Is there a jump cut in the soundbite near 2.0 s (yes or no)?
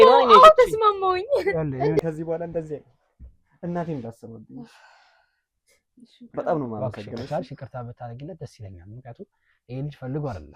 yes